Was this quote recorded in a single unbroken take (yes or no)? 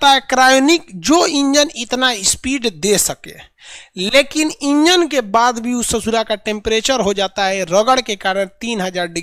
yes